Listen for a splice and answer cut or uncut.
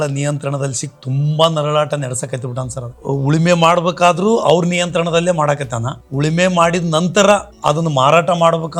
uncut